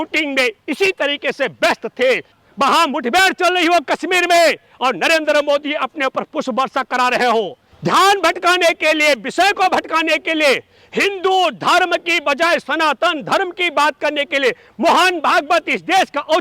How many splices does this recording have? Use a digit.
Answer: 2